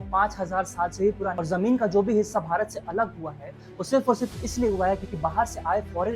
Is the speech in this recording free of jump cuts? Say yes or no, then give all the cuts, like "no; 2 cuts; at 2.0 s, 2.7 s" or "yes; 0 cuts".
no; 1 cut; at 1.4 s